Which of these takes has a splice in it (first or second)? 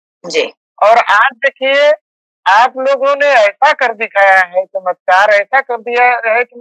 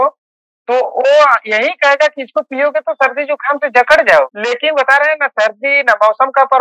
second